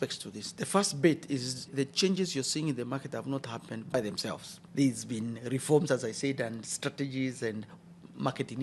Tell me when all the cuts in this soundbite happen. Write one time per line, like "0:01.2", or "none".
none